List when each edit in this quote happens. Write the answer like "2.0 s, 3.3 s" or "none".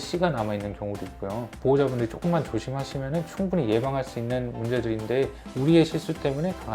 1.5 s